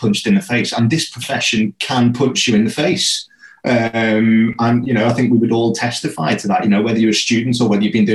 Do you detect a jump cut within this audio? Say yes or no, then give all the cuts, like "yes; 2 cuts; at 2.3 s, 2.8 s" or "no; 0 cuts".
no; 0 cuts